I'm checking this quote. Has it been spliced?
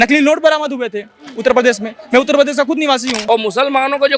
yes; 1 cut; at 3.1 s

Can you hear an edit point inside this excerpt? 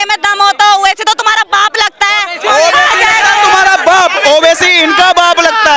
no; 0 cuts

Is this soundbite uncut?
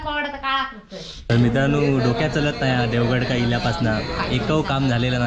no; 1 cut; at 1.3 s

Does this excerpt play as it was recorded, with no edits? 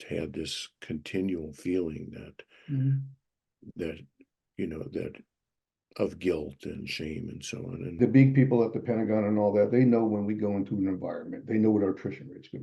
no; 1 cut; at 8.0 s

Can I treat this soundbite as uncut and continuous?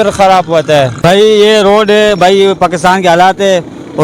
no; 1 cut; at 1.0 s

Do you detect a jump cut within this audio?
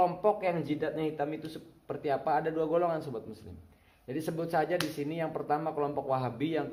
no; 0 cuts

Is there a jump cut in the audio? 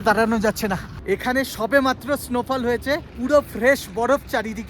yes; 1 cut; at 1.0 s

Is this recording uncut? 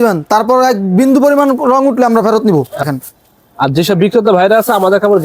no; 1 cut; at 2.9 s

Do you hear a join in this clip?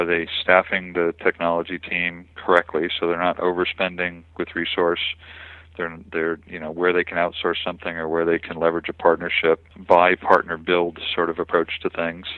yes; 1 cut; at 9.7 s

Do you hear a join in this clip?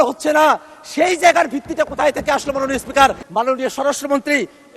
yes; 1 cut; at 3.2 s

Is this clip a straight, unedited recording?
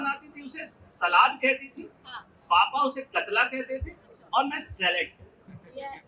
yes; 0 cuts

